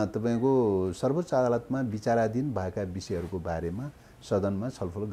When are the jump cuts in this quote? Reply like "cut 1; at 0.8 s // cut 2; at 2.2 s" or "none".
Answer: none